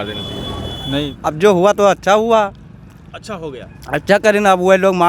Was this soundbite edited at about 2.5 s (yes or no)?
no